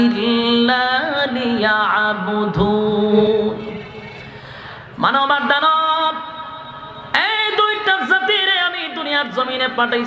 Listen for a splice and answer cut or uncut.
cut